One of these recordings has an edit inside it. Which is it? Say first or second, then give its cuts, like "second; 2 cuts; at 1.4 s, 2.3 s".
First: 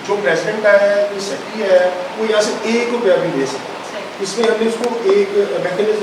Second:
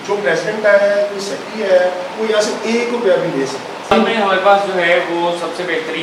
second; 1 cut; at 3.9 s